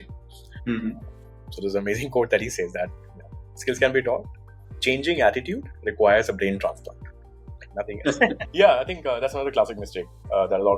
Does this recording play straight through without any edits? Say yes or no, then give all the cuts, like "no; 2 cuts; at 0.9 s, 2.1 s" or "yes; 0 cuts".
no; 1 cut; at 8.4 s